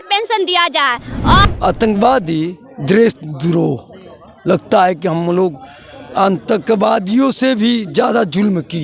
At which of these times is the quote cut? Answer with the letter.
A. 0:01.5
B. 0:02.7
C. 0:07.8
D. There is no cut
A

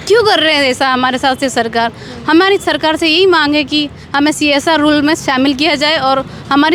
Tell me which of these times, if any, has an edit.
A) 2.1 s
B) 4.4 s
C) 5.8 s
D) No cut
D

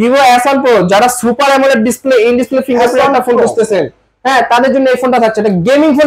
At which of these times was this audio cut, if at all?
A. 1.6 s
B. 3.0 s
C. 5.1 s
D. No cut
D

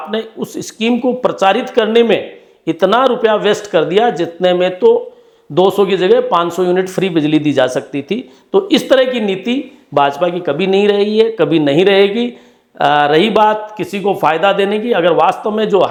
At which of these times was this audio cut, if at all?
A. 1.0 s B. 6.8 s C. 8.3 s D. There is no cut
D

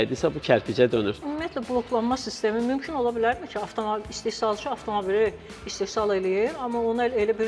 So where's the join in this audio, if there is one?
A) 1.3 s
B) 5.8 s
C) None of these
A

